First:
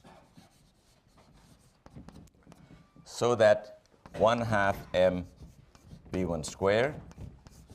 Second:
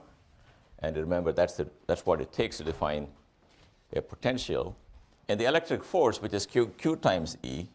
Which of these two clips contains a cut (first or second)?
first